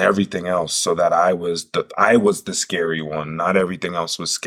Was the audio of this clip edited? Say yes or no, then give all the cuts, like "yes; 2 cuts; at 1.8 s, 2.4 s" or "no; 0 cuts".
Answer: no; 0 cuts